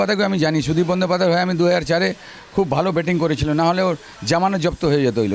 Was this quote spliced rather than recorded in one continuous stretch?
no; 0 cuts

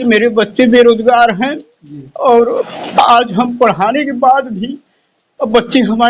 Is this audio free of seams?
yes; 0 cuts

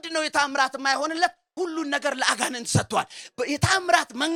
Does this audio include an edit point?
no; 0 cuts

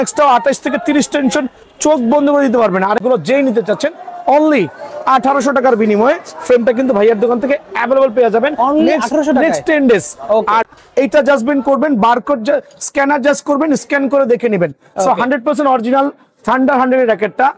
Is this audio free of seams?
no; 2 cuts; at 3.0 s, 10.7 s

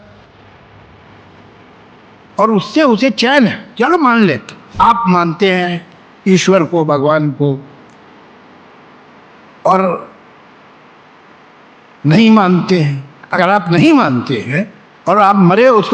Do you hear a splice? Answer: yes; 1 cut; at 4.6 s

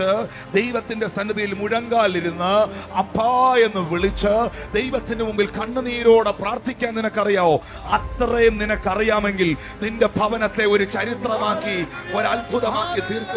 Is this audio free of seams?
yes; 0 cuts

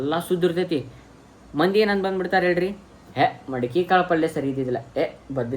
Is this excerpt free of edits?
yes; 0 cuts

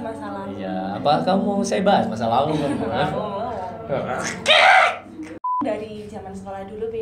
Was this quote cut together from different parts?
yes; 1 cut; at 5.6 s

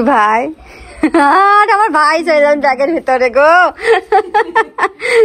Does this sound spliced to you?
no; 0 cuts

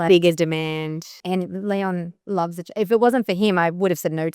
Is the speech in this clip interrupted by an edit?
yes; 1 cut; at 1.2 s

